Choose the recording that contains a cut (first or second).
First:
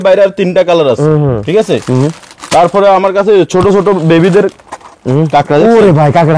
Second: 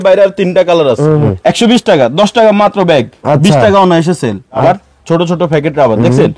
second